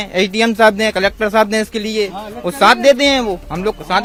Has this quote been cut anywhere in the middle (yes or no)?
no